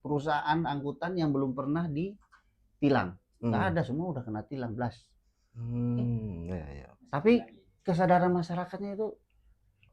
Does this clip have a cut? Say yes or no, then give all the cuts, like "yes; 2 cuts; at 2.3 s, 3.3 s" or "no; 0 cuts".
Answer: no; 0 cuts